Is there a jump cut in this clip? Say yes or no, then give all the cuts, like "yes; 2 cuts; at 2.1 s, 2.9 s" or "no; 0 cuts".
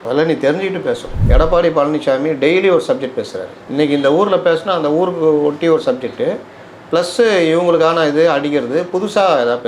yes; 1 cut; at 1.1 s